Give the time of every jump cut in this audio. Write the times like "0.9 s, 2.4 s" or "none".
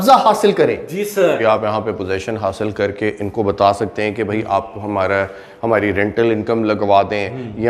1.4 s